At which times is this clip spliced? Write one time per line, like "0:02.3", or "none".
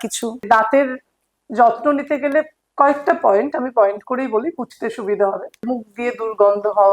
0:05.7